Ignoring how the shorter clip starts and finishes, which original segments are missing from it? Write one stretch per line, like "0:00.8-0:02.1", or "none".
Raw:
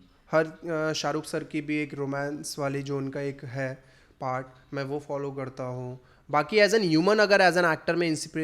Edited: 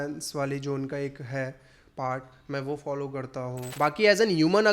0:05.9-0:06.2